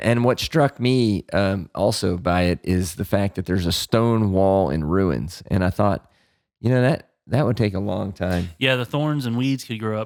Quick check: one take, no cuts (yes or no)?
yes